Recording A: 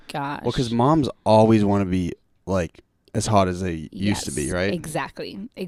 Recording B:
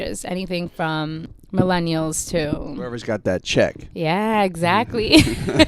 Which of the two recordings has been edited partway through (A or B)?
B